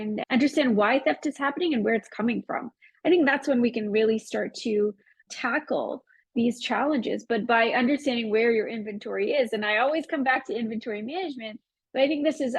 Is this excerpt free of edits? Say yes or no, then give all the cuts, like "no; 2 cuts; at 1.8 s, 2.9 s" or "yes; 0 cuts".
yes; 0 cuts